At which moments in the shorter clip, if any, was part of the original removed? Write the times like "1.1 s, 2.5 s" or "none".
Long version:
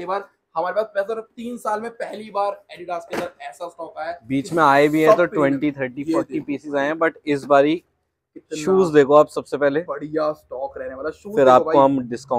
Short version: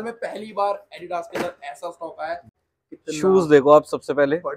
2.4 s